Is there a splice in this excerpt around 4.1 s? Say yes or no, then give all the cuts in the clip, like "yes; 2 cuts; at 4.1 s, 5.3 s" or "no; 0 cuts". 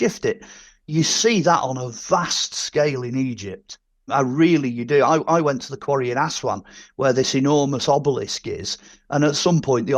yes; 1 cut; at 4.1 s